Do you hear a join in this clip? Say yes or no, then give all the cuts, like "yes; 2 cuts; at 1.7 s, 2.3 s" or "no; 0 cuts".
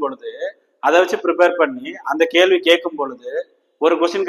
no; 0 cuts